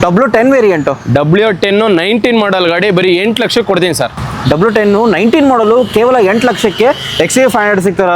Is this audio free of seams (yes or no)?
yes